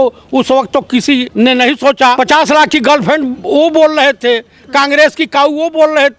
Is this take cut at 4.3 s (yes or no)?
no